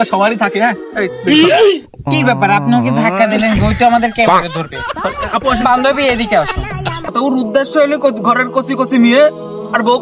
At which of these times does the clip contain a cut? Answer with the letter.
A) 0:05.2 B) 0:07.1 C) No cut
B